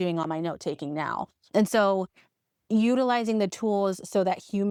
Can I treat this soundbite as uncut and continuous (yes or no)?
yes